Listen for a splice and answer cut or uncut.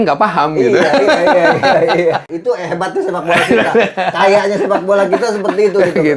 cut